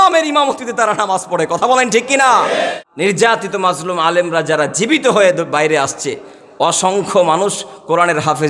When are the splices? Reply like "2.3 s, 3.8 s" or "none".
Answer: 2.8 s